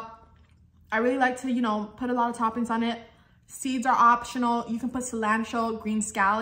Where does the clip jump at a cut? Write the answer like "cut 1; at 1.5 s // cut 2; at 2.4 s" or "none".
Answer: none